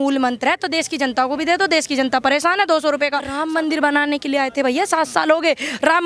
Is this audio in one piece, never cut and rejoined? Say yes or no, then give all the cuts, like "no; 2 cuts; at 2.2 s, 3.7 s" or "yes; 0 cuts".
no; 1 cut; at 3.3 s